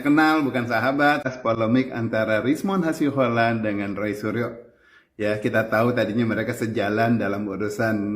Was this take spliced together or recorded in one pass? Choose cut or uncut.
cut